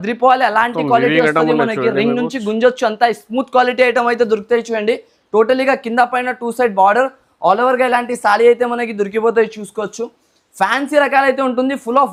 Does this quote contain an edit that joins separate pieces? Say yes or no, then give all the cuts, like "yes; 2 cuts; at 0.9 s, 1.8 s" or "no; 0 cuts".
no; 0 cuts